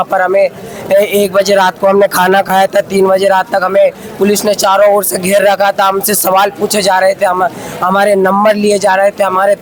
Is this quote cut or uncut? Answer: uncut